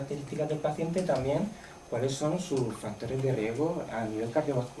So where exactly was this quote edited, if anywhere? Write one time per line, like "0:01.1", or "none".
none